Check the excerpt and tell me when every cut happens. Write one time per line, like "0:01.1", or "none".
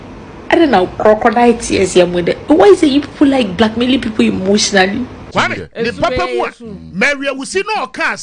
0:05.2